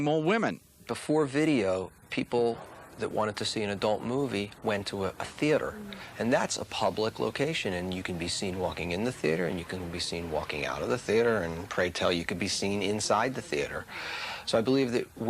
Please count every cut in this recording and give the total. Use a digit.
1